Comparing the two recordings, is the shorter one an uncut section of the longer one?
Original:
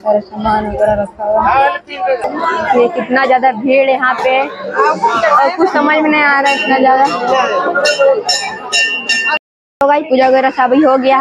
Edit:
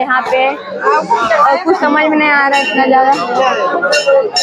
yes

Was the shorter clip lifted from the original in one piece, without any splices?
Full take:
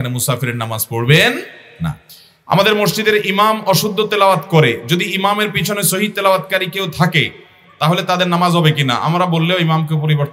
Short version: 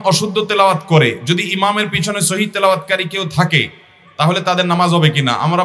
yes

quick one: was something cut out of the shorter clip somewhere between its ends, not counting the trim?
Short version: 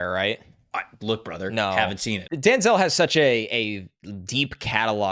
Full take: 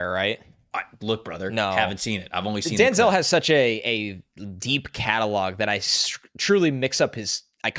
yes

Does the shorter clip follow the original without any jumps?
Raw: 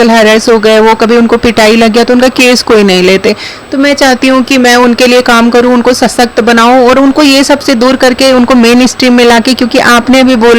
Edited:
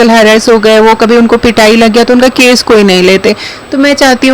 yes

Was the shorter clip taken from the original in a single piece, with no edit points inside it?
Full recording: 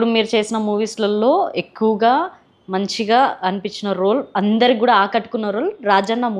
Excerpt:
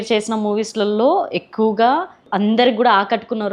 no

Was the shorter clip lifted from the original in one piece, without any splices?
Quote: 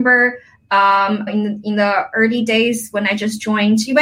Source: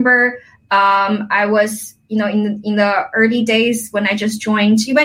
no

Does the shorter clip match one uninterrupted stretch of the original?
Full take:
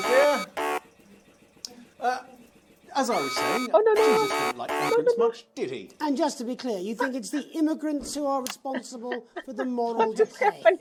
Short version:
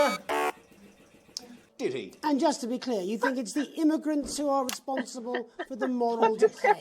no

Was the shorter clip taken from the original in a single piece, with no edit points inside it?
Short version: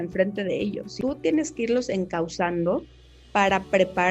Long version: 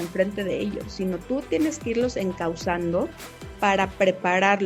no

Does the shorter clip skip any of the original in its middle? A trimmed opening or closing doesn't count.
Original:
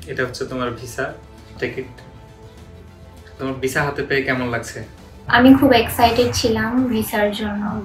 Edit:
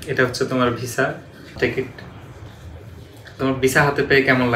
no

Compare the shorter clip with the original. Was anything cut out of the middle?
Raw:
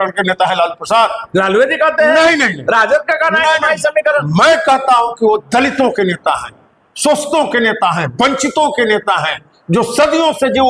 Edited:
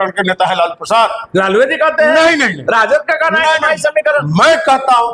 no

